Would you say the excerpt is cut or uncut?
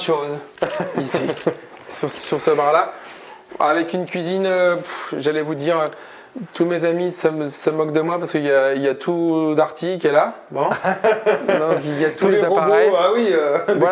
uncut